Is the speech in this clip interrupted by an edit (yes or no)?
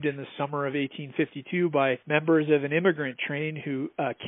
yes